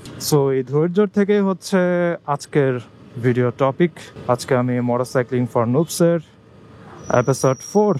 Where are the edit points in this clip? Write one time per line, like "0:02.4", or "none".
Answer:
none